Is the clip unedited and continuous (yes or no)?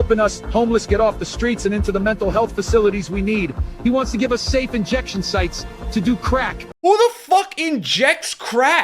no